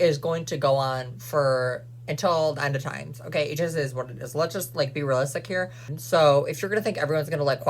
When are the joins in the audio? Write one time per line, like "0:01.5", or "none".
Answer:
0:05.9